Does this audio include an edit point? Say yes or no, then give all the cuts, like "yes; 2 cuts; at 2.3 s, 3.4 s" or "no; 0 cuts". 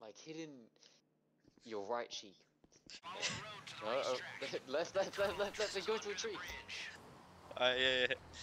yes; 1 cut; at 3.0 s